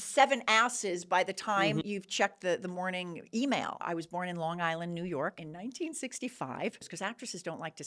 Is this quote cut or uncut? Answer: cut